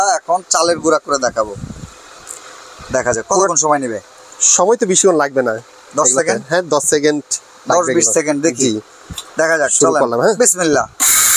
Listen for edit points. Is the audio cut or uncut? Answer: uncut